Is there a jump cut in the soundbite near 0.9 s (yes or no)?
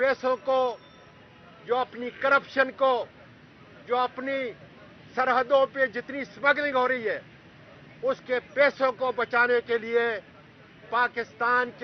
no